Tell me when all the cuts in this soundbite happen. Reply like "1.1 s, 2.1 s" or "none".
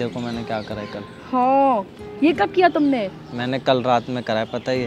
none